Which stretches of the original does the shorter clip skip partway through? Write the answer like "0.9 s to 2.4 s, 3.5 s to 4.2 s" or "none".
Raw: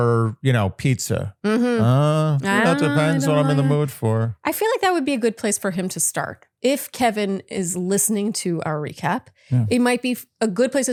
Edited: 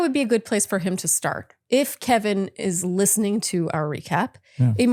none